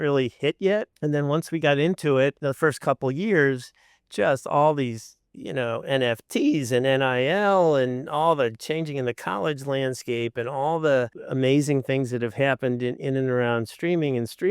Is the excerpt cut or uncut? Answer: cut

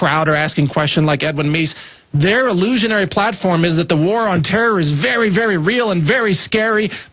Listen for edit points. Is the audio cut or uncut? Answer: cut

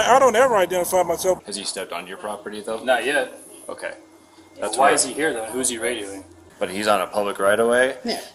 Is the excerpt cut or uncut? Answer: cut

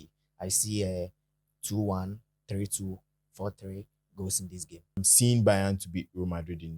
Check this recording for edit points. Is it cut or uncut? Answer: cut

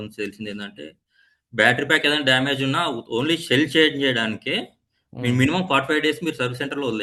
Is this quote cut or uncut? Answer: uncut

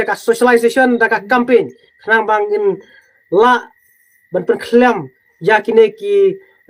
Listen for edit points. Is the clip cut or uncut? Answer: uncut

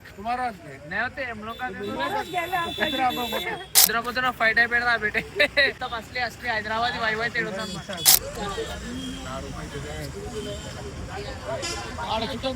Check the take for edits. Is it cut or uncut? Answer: cut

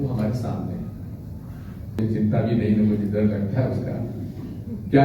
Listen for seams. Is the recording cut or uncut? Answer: cut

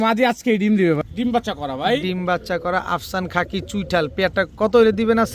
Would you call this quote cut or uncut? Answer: cut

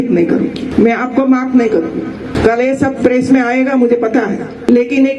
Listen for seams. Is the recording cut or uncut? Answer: uncut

